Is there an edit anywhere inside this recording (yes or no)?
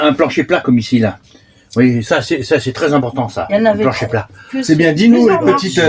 no